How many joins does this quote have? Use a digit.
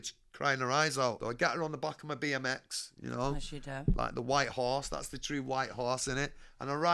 1